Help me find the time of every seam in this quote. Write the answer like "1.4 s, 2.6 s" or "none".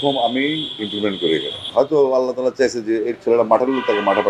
1.7 s